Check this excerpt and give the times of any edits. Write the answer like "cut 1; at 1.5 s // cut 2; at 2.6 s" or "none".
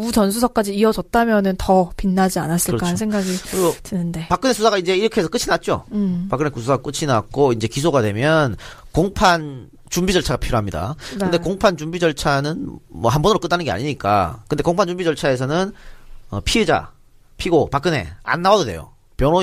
cut 1; at 16.7 s